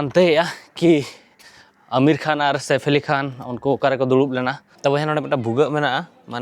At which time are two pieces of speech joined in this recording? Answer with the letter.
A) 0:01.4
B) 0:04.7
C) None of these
B